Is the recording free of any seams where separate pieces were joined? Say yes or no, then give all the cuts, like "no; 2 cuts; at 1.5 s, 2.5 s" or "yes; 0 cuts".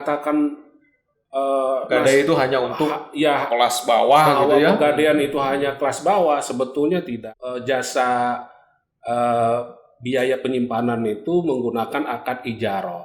no; 1 cut; at 7.1 s